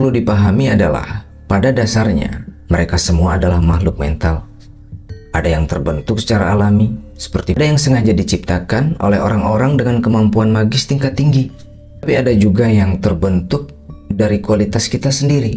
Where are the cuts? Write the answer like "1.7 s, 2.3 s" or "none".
7.6 s, 12.0 s